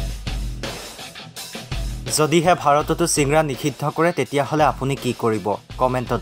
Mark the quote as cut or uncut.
uncut